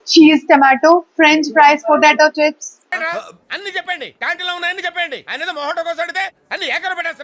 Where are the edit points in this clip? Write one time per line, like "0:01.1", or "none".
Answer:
none